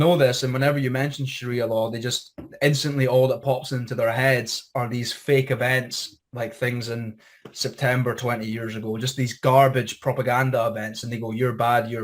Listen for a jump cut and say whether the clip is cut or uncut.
uncut